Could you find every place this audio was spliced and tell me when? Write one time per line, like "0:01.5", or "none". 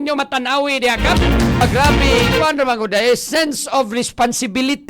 0:01.6